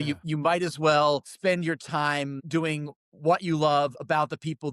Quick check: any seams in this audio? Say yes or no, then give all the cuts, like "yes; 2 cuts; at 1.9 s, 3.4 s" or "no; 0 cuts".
yes; 2 cuts; at 1.3 s, 2.4 s